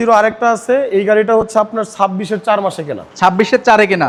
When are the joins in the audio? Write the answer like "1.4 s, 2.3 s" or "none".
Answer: none